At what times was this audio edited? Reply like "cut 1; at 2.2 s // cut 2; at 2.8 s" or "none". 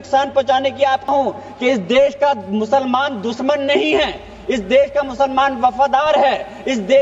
cut 1; at 1.1 s